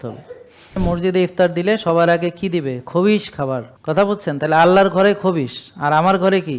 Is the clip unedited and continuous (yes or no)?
no